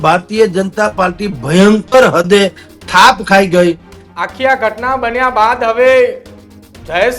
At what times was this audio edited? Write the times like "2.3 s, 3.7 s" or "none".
3.9 s